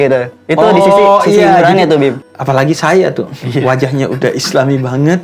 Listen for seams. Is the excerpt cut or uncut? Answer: cut